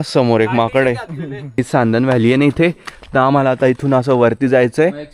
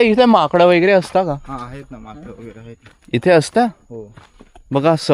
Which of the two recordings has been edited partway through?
first; 1 cut; at 1.4 s

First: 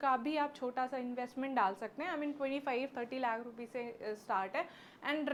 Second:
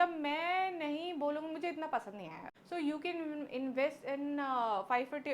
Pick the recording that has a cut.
second; 1 cut; at 2.5 s

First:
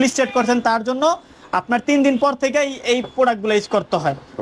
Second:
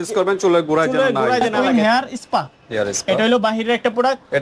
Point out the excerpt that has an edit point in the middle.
second; 1 cut; at 1.6 s

